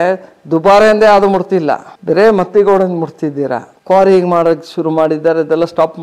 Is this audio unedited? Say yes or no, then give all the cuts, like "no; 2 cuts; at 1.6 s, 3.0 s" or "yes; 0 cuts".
no; 2 cuts; at 1.9 s, 3.7 s